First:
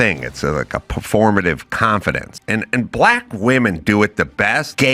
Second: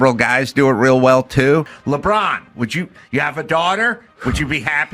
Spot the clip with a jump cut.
second; 1 cut; at 1.7 s

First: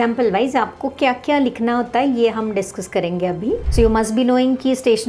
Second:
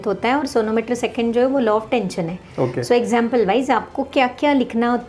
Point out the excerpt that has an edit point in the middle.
first; 1 cut; at 3.7 s

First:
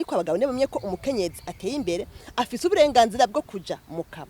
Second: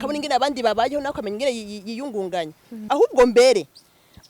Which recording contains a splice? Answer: second; 1 cut; at 2.8 s

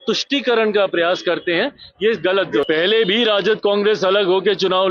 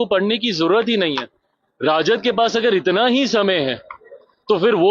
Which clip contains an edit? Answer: first; 1 cut; at 2.6 s

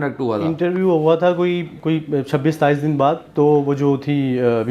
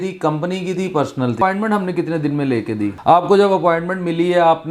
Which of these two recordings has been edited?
second; 2 cuts; at 1.4 s, 3.0 s

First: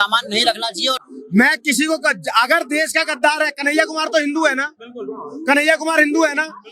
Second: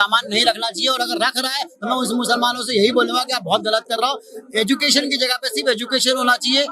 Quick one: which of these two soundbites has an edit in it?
first; 1 cut; at 1.0 s

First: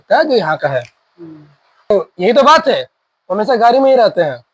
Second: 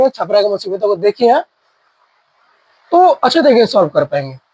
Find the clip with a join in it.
first; 1 cut; at 1.9 s

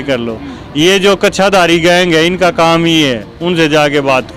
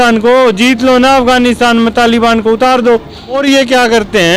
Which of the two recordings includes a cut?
second; 1 cut; at 3.4 s

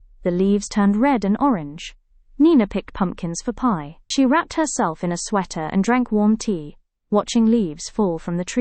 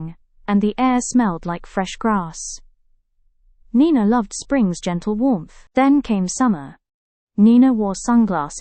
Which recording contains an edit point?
first; 1 cut; at 4.0 s

